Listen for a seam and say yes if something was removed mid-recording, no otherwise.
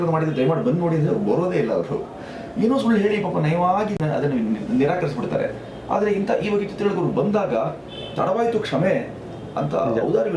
no